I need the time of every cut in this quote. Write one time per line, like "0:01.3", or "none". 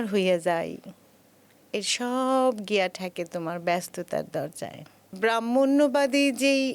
0:05.0